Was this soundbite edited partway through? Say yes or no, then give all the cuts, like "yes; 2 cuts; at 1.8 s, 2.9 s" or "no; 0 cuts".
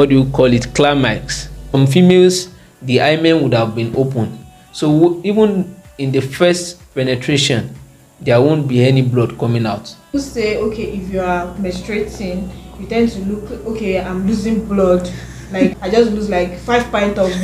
yes; 3 cuts; at 1.8 s, 10.1 s, 15.7 s